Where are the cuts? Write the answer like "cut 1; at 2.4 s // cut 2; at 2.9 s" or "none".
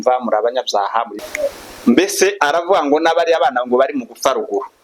cut 1; at 1.2 s